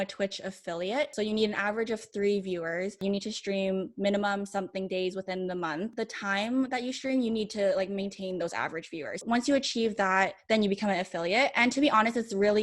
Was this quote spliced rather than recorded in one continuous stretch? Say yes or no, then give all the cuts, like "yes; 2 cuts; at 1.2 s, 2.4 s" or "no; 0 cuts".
yes; 4 cuts; at 1.1 s, 3.0 s, 6.0 s, 9.2 s